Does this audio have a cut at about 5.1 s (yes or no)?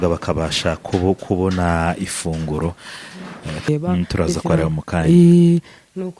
no